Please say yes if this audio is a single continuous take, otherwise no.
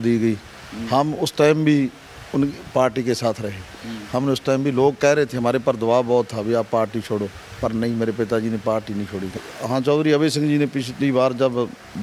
no